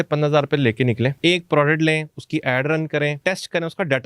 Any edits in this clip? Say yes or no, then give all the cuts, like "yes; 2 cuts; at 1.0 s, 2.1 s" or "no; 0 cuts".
yes; 2 cuts; at 1.1 s, 3.2 s